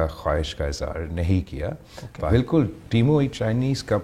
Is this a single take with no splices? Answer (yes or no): no